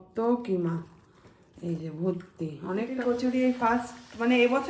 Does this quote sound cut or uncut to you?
cut